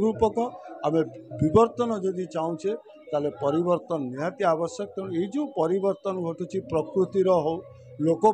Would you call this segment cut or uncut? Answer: uncut